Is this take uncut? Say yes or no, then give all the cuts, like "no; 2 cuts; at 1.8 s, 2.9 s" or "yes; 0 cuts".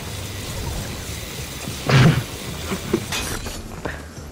yes; 0 cuts